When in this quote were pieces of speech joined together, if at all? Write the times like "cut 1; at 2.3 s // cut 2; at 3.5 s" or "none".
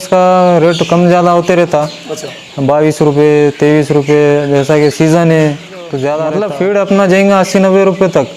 cut 1; at 6.3 s